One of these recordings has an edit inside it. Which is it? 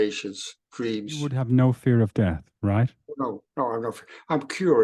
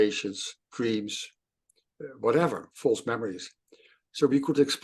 first; 1 cut; at 1.4 s

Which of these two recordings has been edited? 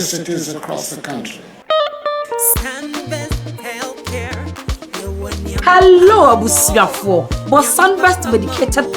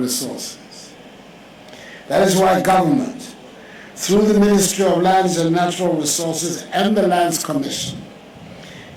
first; 1 cut; at 1.6 s

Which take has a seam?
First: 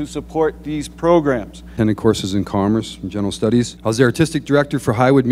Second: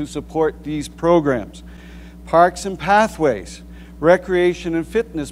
first; 2 cuts; at 1.7 s, 3.7 s

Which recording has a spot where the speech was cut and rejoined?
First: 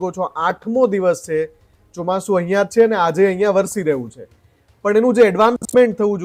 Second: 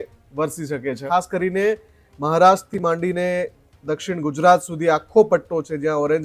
second; 1 cut; at 0.9 s

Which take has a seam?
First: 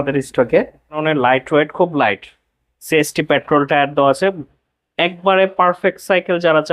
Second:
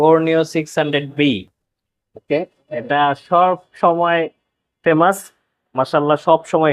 first; 1 cut; at 1.0 s

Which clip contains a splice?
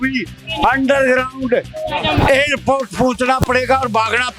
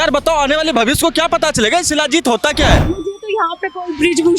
second; 1 cut; at 3.0 s

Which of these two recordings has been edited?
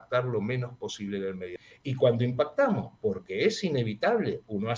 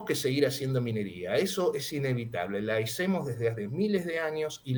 first; 1 cut; at 1.5 s

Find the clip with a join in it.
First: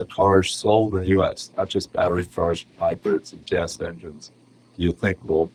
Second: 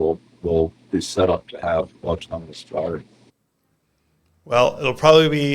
second; 1 cut; at 3.3 s

